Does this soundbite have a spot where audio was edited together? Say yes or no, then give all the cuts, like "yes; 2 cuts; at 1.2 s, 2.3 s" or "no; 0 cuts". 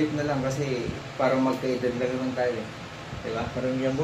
no; 0 cuts